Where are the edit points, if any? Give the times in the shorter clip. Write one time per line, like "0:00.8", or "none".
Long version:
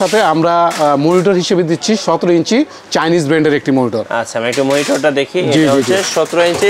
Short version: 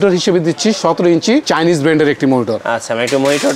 0:01.5